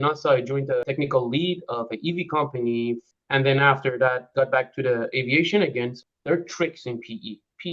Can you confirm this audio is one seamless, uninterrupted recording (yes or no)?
no